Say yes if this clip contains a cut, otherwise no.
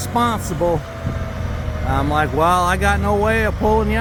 no